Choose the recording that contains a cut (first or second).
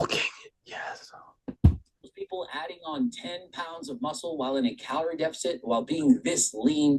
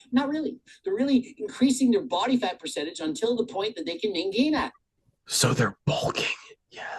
first